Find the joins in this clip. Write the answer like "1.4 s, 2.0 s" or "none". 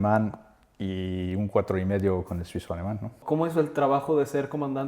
3.2 s